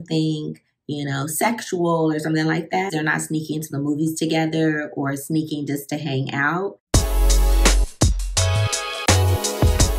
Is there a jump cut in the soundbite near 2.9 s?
yes; 2 cuts; at 2.9 s, 6.8 s

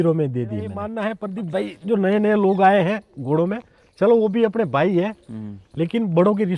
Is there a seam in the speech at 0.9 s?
yes; 1 cut; at 0.9 s

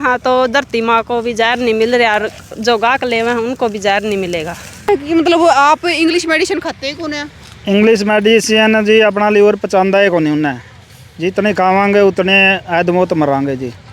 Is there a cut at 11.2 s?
no; 1 cut; at 4.9 s

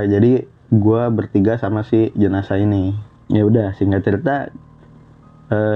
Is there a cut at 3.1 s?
yes; 1 cut; at 3.1 s

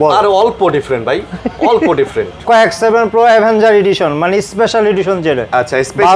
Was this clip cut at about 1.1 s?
no; 1 cut; at 2.4 s

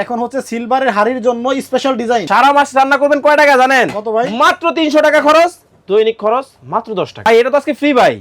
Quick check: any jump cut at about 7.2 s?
yes; 2 cuts; at 2.3 s, 7.2 s

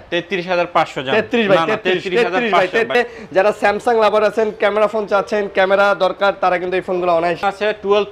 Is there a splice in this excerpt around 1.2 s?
no; 2 cuts; at 3.0 s, 7.4 s

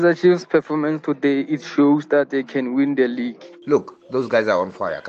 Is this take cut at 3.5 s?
yes; 1 cut; at 3.5 s

